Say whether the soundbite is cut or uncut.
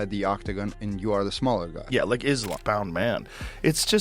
cut